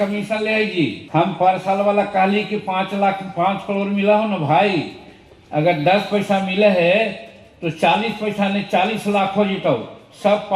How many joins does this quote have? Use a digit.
1